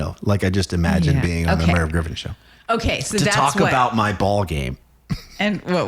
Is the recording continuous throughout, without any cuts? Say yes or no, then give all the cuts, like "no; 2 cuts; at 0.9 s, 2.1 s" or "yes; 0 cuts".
no; 1 cut; at 4.7 s